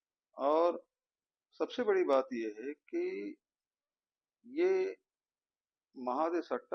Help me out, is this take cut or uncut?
uncut